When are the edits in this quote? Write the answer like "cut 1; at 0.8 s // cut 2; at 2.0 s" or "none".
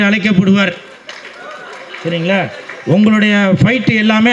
none

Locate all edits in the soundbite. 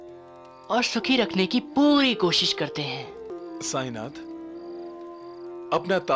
cut 1; at 3.3 s

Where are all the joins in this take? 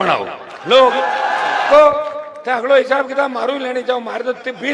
cut 1; at 1.7 s

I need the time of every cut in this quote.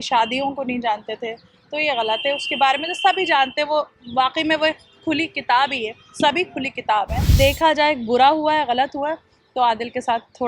cut 1; at 7.2 s

